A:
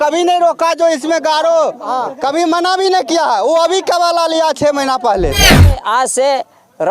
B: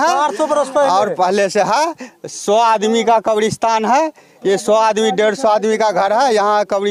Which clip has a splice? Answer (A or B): A